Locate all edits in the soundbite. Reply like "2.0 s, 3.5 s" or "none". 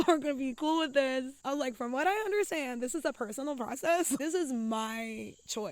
1.3 s, 4.2 s